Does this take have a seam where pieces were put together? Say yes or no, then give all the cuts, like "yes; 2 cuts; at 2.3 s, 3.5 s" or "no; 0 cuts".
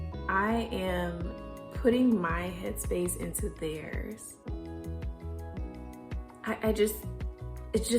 no; 0 cuts